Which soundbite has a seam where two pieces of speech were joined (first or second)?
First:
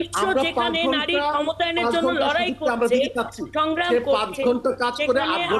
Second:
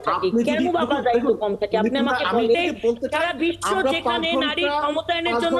second